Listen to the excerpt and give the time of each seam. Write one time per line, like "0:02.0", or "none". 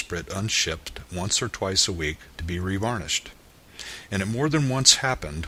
none